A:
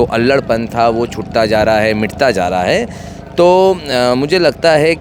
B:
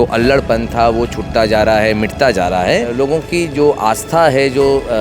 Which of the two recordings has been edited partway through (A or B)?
B